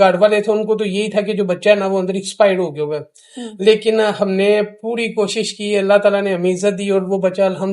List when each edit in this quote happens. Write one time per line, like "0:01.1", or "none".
none